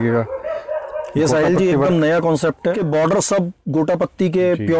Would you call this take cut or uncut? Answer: cut